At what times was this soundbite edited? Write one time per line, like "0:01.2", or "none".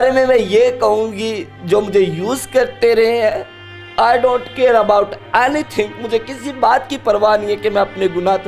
none